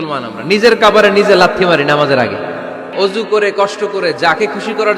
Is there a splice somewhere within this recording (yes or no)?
yes